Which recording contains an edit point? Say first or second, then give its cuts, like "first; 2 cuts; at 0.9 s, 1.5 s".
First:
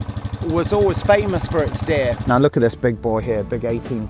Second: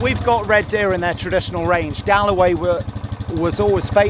first; 1 cut; at 2.2 s